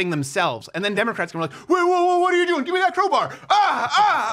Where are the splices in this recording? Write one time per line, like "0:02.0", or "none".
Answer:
none